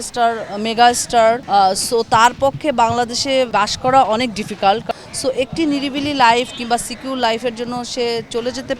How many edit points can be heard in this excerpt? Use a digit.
3